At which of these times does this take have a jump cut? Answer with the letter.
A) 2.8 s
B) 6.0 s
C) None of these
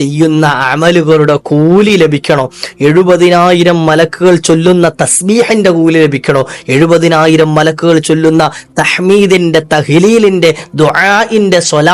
C